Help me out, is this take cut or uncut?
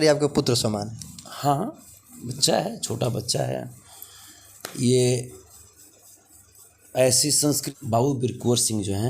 cut